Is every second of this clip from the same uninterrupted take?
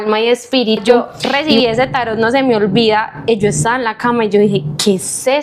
no; 1 cut; at 1.2 s

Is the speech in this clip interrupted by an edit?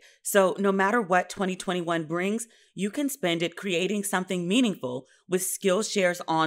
no; 0 cuts

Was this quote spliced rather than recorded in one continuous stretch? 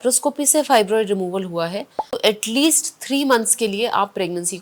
no; 0 cuts

